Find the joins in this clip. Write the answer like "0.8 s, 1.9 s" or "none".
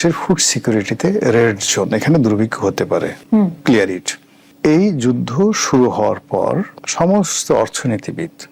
none